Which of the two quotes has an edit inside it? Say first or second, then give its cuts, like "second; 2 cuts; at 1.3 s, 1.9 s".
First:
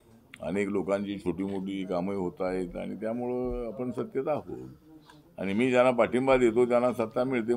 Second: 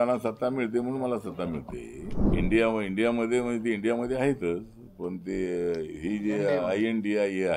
second; 1 cut; at 2.3 s